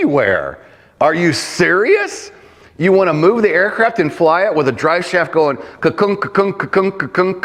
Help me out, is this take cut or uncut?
uncut